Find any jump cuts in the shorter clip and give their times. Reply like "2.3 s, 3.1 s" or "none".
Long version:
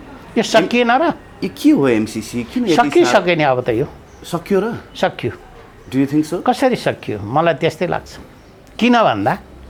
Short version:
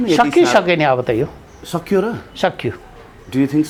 none